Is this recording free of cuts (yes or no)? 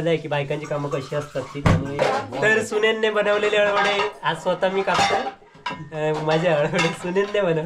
no